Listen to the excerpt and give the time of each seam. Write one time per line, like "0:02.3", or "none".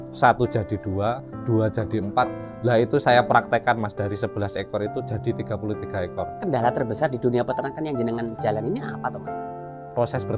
0:06.4